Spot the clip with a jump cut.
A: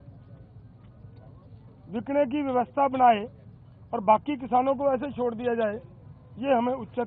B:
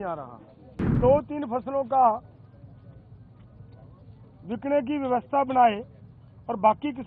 B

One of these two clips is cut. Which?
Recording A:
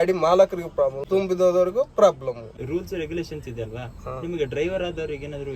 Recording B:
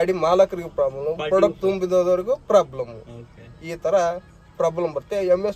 A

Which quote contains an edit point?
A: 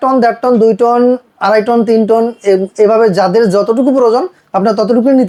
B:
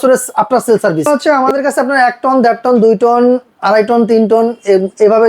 B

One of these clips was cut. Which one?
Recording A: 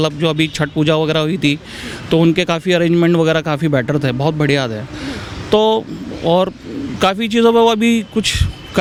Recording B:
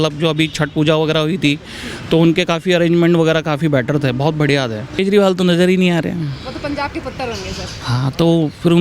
B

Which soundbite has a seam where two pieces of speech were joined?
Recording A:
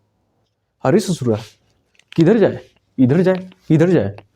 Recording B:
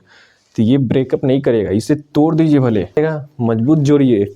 B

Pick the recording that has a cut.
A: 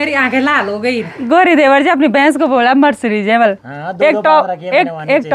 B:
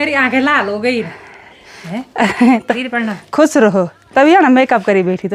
A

